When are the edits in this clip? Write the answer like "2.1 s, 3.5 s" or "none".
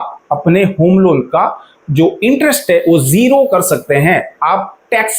none